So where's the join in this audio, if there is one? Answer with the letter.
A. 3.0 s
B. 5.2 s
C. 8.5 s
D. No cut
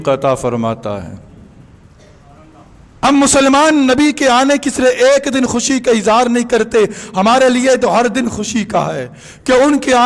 A